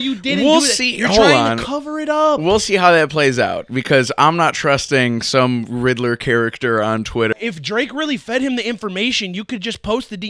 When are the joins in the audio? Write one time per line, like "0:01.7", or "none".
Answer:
0:07.4